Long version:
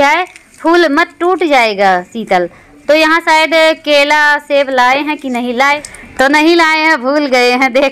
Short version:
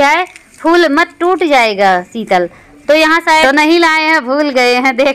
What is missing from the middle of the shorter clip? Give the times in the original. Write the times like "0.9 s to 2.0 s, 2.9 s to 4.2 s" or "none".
3.4 s to 6.2 s